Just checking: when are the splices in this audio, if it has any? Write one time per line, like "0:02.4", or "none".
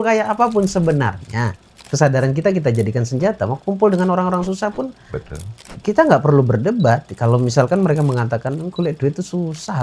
0:01.9